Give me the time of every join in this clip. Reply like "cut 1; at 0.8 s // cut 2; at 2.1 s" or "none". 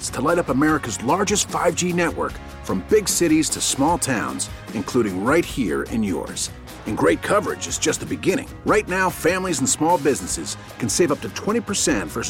none